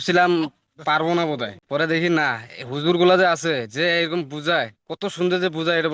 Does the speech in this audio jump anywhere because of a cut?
no; 0 cuts

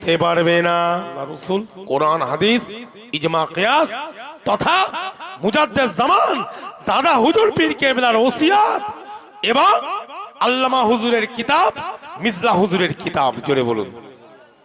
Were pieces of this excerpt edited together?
yes; 1 cut; at 1.2 s

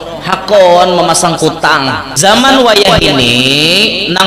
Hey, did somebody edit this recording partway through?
yes; 1 cut; at 2.1 s

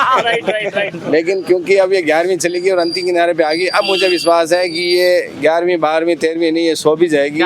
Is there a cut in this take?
no; 0 cuts

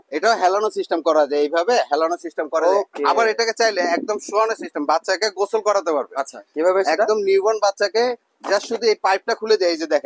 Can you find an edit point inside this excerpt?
no; 0 cuts

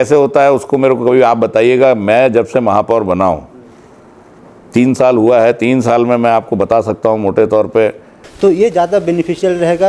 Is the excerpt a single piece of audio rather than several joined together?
no; 1 cut; at 8.2 s

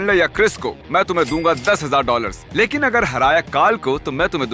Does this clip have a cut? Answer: no; 0 cuts

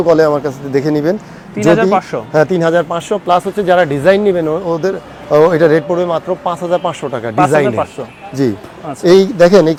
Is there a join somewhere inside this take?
no; 0 cuts

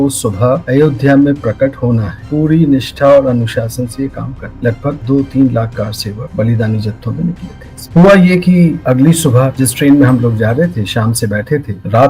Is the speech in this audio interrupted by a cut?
no; 0 cuts

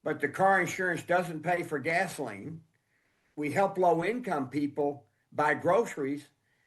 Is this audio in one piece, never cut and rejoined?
no; 1 cut; at 3.3 s

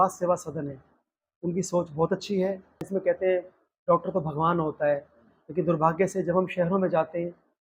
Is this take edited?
yes; 1 cut; at 2.9 s

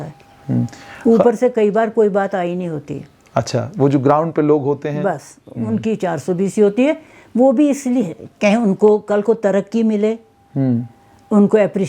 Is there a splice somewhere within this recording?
no; 0 cuts

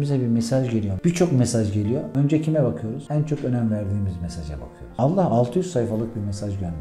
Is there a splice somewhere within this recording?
no; 0 cuts

